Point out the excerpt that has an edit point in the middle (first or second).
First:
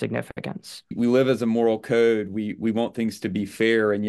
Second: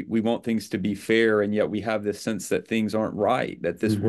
first